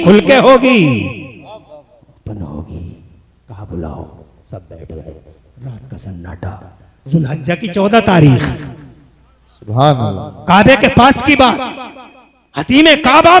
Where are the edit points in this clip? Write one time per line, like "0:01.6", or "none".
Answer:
none